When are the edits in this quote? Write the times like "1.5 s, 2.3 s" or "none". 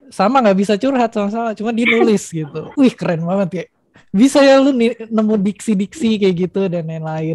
none